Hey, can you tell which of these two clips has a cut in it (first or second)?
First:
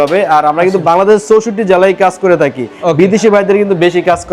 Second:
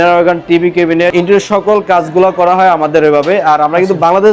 second